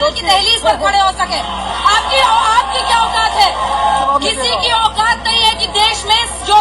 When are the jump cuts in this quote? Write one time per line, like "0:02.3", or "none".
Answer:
none